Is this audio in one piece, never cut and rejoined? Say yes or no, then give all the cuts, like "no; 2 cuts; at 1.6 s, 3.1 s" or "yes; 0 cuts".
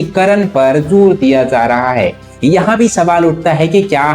no; 1 cut; at 2.2 s